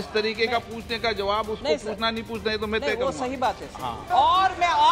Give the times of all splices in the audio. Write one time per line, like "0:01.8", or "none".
0:04.0

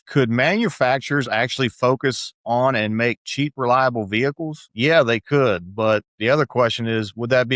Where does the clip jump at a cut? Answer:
none

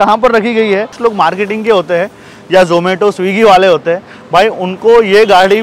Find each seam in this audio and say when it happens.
0:01.0

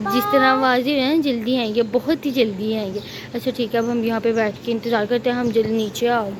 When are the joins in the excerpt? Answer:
none

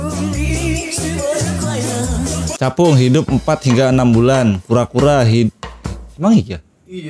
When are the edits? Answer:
0:02.5

